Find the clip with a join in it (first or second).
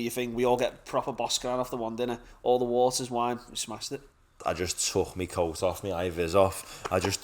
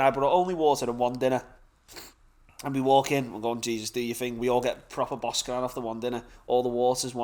first